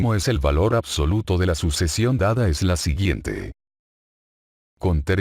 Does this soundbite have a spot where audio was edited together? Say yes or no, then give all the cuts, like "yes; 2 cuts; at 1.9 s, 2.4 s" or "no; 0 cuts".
yes; 1 cut; at 1.3 s